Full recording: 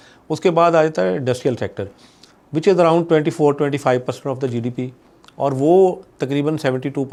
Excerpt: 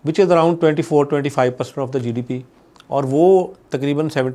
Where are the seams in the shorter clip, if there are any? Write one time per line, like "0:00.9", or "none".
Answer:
none